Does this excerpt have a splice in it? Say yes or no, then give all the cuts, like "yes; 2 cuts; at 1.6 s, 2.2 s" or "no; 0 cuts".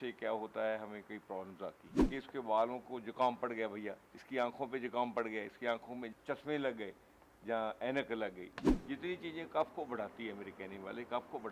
yes; 3 cuts; at 1.9 s, 6.1 s, 8.7 s